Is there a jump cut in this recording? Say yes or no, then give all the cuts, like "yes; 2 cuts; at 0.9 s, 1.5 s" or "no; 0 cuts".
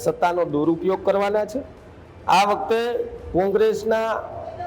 no; 0 cuts